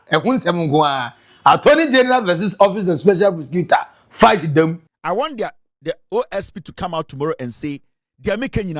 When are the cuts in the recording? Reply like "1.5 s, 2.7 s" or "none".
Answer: 4.9 s